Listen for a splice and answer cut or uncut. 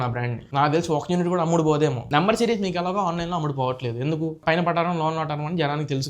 cut